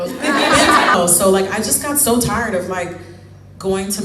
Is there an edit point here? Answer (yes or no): yes